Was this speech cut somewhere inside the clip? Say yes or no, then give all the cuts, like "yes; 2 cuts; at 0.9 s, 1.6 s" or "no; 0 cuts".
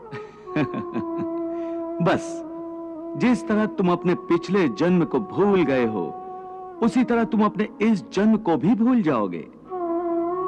no; 0 cuts